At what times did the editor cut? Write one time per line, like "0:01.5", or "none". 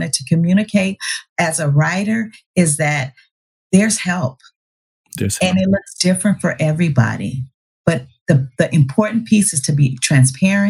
none